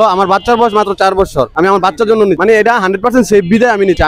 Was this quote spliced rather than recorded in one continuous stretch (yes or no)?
no